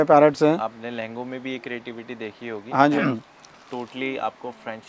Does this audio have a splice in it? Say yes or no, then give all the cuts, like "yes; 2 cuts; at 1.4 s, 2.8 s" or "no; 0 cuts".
yes; 1 cut; at 3.0 s